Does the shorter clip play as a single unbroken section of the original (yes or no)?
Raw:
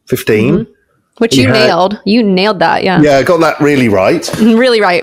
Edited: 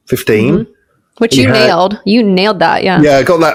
yes